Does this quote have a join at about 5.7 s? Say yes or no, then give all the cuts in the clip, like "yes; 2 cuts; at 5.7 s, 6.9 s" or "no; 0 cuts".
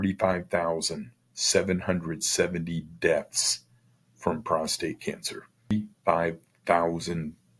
yes; 1 cut; at 5.7 s